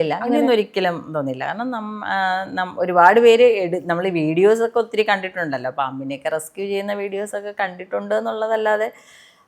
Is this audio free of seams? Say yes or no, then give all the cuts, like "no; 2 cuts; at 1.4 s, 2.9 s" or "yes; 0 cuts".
yes; 0 cuts